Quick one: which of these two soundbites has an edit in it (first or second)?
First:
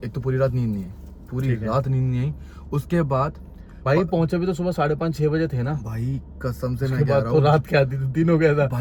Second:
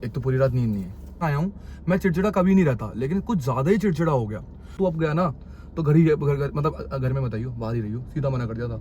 second